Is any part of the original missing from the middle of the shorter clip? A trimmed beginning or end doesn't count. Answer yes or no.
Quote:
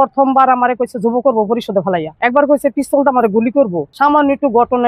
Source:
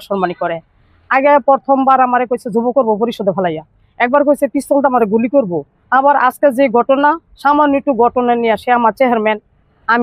yes